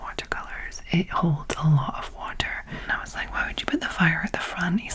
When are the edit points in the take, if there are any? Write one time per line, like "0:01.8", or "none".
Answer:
0:02.8